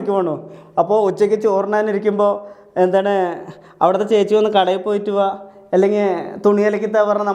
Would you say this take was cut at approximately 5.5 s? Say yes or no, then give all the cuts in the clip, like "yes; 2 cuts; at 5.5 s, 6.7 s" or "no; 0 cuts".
no; 0 cuts